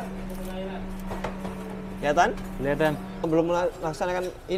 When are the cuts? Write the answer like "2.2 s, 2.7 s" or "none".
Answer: 3.3 s